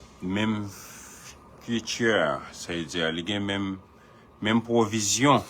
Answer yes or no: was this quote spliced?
no